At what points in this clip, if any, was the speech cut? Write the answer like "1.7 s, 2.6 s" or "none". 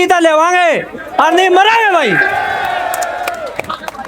none